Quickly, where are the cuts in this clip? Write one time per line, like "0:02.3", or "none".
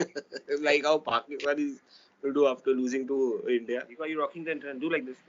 0:03.9